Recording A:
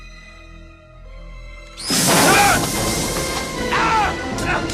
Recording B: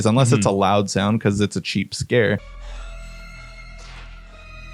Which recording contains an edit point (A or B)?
B